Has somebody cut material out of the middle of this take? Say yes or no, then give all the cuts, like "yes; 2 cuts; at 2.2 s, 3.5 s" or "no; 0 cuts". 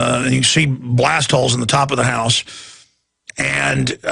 yes; 1 cut; at 1.7 s